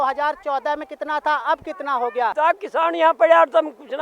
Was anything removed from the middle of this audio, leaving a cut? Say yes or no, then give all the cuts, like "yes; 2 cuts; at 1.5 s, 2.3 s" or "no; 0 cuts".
yes; 1 cut; at 2.3 s